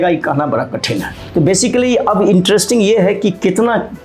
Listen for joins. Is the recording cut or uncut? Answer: cut